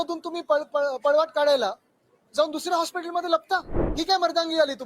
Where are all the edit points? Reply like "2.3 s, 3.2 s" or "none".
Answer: 3.8 s